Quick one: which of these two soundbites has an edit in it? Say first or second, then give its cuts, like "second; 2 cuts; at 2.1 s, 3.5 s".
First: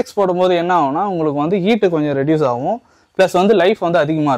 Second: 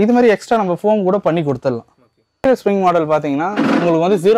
second; 1 cut; at 2.4 s